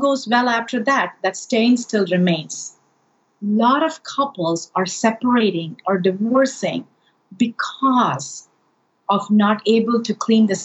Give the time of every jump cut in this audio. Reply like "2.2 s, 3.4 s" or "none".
3.3 s